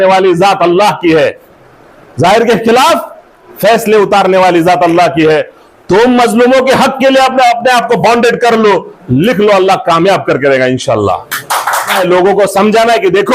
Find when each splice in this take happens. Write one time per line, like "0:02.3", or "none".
0:12.0